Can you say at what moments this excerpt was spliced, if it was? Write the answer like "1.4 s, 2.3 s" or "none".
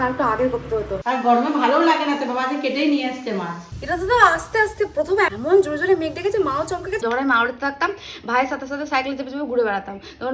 1.0 s, 3.6 s, 7.0 s

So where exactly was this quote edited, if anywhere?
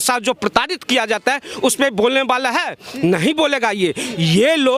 none

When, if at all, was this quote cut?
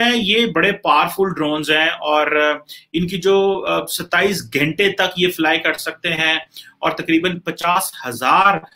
none

